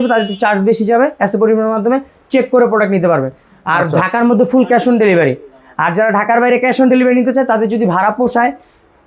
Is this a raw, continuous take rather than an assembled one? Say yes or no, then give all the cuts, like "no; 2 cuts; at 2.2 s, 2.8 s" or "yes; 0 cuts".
yes; 0 cuts